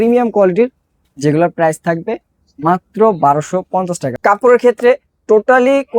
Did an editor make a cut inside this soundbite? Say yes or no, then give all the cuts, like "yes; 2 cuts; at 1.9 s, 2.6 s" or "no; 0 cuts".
yes; 1 cut; at 4.0 s